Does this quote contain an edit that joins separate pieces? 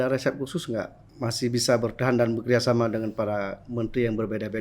yes; 1 cut; at 1.0 s

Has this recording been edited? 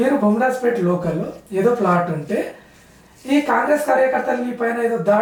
no; 0 cuts

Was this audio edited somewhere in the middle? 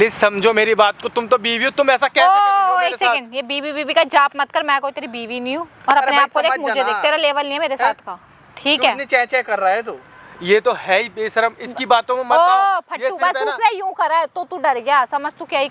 no; 0 cuts

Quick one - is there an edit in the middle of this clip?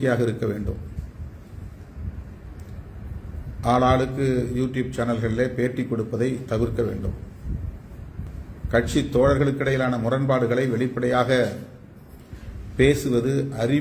yes; 1 cut; at 8.3 s

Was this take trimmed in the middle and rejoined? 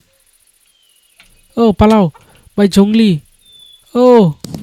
no; 0 cuts

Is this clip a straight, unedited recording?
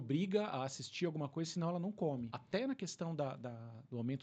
no; 1 cut; at 2.4 s

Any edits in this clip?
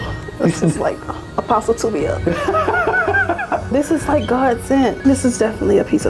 yes; 2 cuts; at 3.7 s, 5.0 s

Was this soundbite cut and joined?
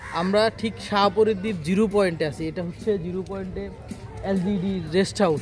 no; 0 cuts

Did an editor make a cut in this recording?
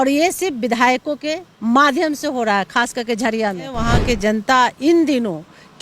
yes; 1 cut; at 3.7 s

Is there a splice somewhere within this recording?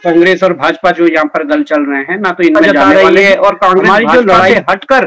yes; 1 cut; at 2.9 s

